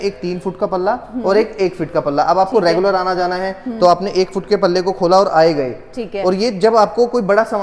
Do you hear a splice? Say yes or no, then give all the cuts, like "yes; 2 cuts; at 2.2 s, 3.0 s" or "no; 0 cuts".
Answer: no; 0 cuts